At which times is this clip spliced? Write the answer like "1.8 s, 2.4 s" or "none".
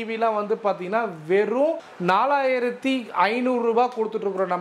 1.9 s